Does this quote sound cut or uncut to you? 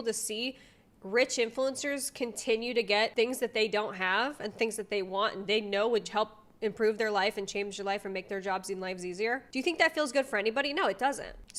uncut